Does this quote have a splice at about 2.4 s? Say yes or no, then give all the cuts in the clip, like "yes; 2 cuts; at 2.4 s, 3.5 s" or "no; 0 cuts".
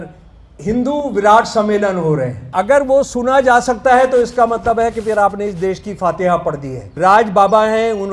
yes; 2 cuts; at 2.4 s, 6.9 s